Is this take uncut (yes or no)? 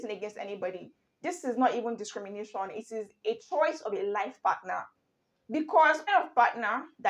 no